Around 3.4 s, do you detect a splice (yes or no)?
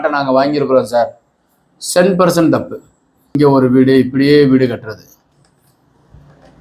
yes